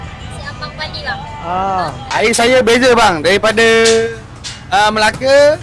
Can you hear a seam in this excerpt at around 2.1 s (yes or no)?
yes